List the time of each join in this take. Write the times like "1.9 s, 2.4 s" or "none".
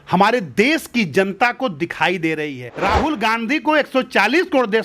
2.6 s